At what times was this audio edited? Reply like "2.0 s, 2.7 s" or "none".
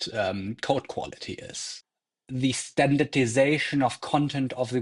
1.7 s